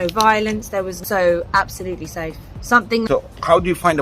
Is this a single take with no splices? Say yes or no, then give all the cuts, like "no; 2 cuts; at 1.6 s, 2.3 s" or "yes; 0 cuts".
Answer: no; 2 cuts; at 1.0 s, 3.1 s